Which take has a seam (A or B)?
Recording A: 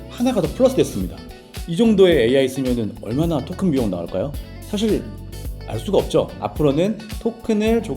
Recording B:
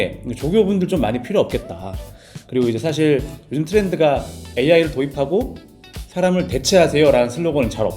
A